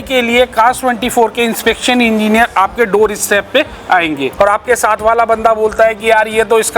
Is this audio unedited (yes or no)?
no